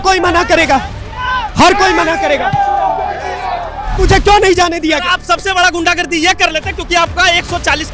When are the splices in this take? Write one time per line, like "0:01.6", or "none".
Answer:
0:03.9